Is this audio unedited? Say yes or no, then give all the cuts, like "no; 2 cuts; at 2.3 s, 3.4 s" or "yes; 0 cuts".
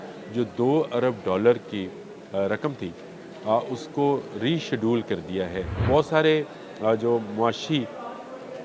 no; 1 cut; at 5.8 s